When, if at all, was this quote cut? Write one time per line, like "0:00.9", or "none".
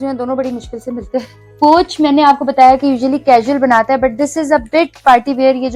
0:01.4

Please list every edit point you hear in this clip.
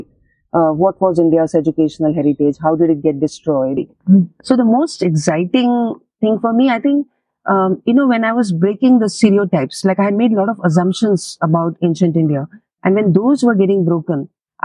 0:03.9

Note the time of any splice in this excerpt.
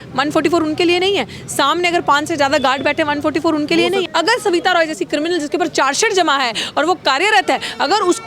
0:04.1

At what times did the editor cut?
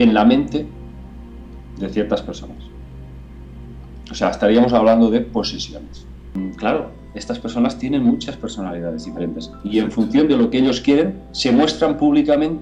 0:06.3

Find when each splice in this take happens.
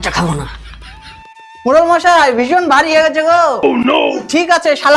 none

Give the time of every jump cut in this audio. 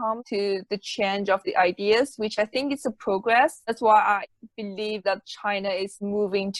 none

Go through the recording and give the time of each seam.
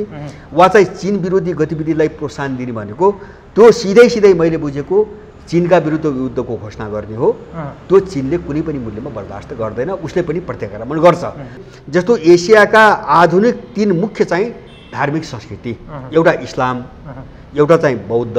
0:11.7

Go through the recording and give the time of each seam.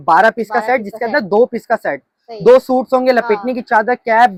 none

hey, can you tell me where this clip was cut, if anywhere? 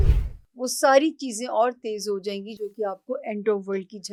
none

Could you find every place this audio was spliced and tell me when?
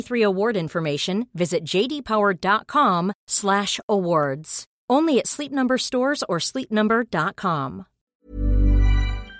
0:08.1

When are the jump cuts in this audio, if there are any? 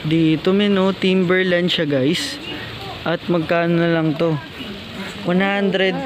none

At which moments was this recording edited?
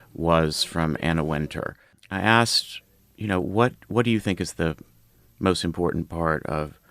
0:02.0

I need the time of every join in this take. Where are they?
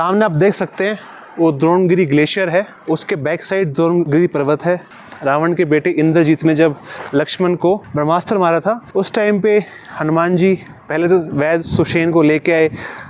none

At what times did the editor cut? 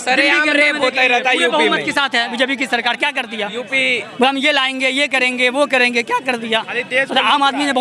none

